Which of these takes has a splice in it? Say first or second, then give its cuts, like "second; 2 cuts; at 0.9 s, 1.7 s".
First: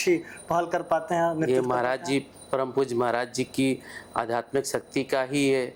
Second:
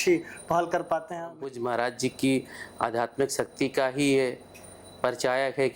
second; 1 cut; at 1.1 s